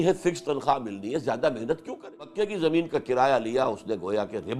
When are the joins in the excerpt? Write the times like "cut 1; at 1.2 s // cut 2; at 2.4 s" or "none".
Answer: cut 1; at 2.3 s